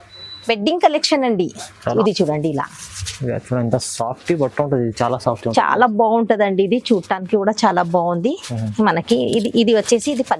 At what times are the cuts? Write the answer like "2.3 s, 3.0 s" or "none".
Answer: 1.9 s